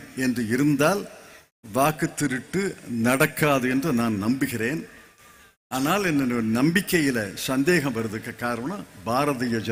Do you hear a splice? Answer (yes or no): no